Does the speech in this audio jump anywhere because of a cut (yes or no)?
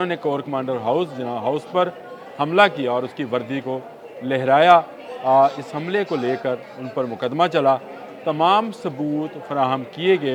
no